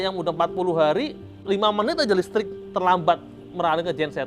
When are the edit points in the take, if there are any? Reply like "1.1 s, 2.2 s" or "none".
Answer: 1.4 s